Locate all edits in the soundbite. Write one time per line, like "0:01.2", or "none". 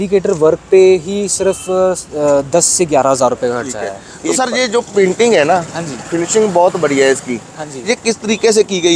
0:04.1